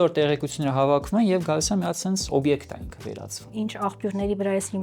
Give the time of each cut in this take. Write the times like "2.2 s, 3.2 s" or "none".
3.5 s